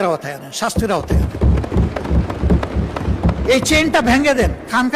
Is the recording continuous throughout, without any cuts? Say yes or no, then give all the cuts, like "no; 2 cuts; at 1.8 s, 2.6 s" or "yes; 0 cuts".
yes; 0 cuts